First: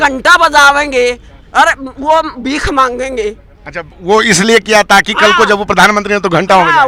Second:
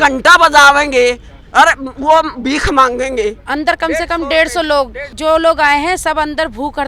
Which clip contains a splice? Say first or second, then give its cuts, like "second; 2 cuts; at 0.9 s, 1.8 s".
second; 2 cuts; at 3.4 s, 5.1 s